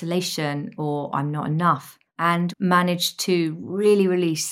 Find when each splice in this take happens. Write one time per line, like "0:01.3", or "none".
0:02.3